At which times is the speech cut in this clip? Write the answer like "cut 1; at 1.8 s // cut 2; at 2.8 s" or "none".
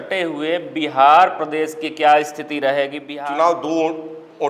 cut 1; at 3.0 s